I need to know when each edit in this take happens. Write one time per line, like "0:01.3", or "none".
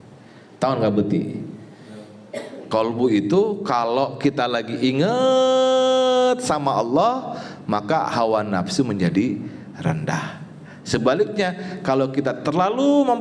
0:02.7